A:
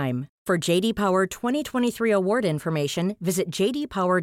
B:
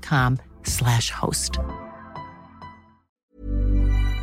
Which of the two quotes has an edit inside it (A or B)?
B